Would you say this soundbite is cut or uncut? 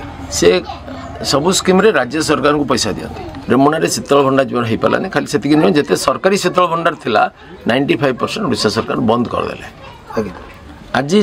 cut